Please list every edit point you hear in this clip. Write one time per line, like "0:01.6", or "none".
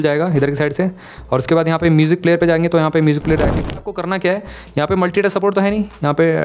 0:03.6

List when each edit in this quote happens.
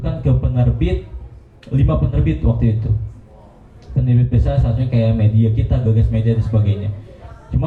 none

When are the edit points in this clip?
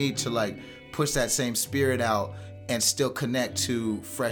none

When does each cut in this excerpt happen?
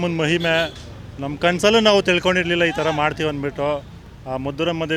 none

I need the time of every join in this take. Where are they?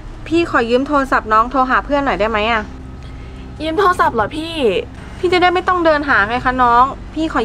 none

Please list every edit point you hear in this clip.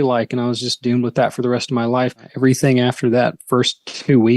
0:02.3

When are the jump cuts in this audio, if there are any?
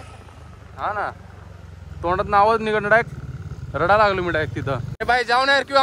0:04.9

